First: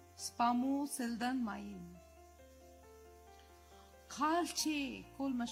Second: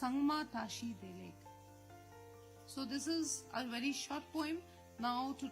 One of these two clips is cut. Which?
second; 2 cuts; at 1.3 s, 2.7 s

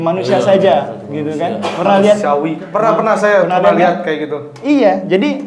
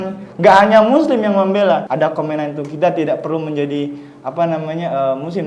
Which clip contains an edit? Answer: second; 1 cut; at 1.9 s

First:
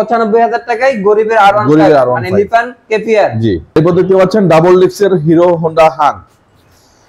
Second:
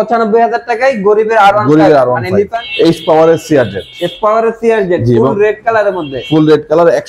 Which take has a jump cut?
second; 1 cut; at 2.6 s

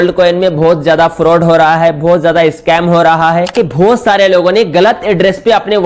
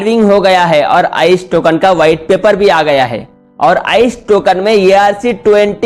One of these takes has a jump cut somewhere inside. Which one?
first; 1 cut; at 3.5 s

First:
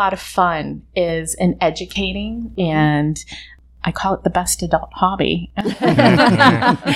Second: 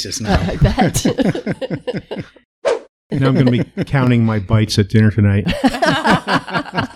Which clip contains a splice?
second; 1 cut; at 2.7 s

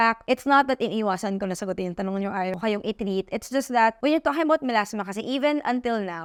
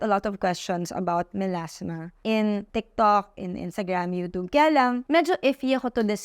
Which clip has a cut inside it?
second; 2 cuts; at 2.1 s, 2.7 s

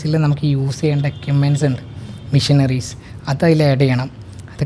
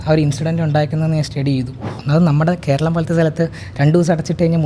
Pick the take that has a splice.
second; 1 cut; at 1.9 s

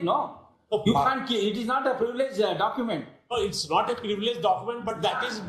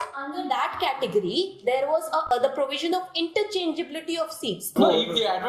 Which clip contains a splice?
second; 2 cuts; at 2.3 s, 4.7 s

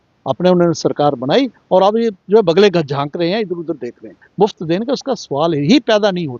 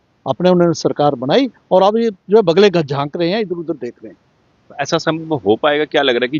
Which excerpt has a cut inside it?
first; 1 cut; at 4.3 s

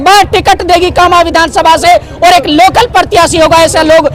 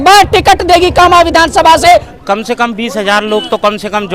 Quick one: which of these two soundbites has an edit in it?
second; 1 cut; at 2.1 s

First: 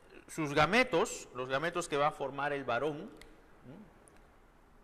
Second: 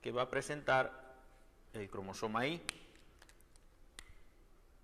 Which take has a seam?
second; 1 cut; at 2.9 s

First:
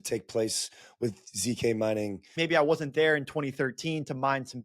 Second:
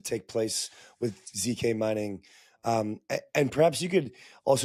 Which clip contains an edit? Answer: first; 1 cut; at 2.3 s

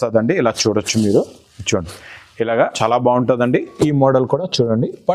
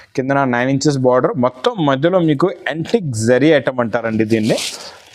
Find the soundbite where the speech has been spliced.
first; 1 cut; at 2.8 s

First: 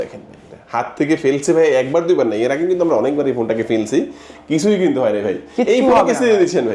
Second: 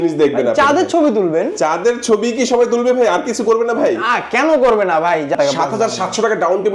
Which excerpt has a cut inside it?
second; 1 cut; at 5.3 s

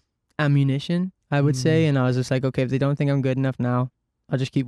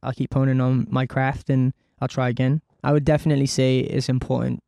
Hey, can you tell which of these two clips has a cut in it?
second; 1 cut; at 2.8 s

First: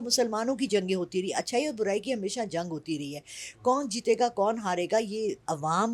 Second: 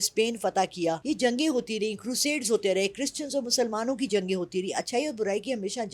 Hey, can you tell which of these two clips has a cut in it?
second; 1 cut; at 1.0 s

